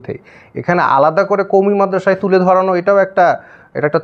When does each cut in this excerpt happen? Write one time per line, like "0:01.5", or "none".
none